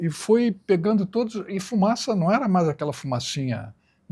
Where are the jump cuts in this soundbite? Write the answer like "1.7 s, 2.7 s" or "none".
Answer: none

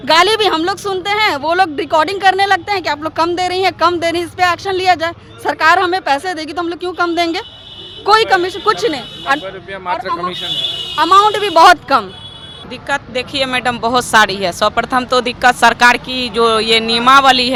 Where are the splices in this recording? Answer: none

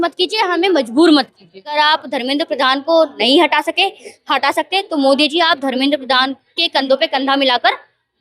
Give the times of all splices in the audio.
1.8 s

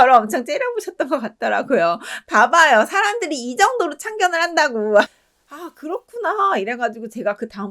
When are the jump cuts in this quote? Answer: 5.1 s

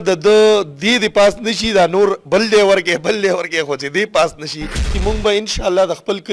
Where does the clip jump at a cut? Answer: 4.9 s

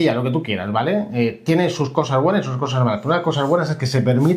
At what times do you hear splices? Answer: none

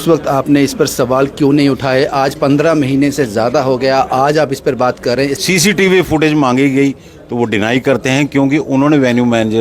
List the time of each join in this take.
5.4 s

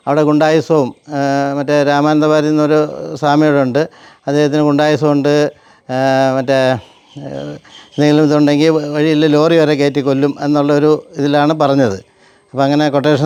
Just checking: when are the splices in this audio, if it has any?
none

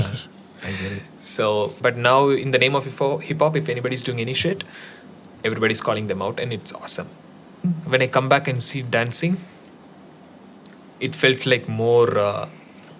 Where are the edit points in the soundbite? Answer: 1.8 s, 7.6 s

